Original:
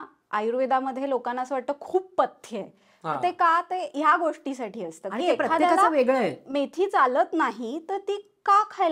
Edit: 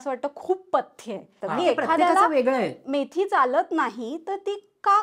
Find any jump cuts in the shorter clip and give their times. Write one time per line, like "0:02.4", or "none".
0:01.3